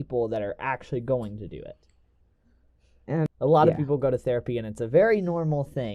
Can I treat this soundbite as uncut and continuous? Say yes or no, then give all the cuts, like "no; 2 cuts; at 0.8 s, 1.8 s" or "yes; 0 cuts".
no; 1 cut; at 3.3 s